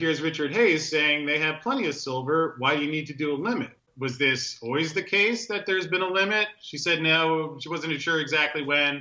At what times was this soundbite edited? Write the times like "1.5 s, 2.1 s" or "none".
3.9 s